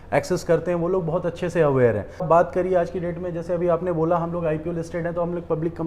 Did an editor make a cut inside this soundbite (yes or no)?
yes